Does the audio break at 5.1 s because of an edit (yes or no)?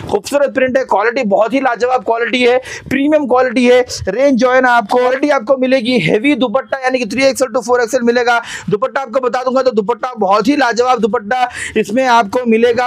yes